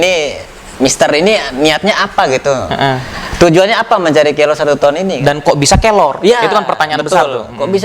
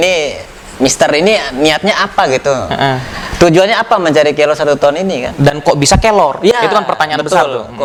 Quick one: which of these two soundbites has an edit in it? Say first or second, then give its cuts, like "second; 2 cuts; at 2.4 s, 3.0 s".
first; 1 cut; at 5.2 s